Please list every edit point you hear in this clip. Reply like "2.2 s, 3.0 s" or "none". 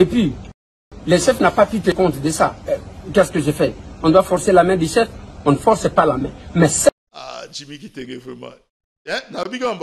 6.9 s